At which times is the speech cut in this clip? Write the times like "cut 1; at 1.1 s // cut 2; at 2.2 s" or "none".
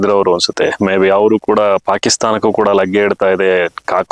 none